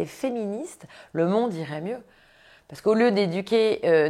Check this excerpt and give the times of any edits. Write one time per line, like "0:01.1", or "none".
none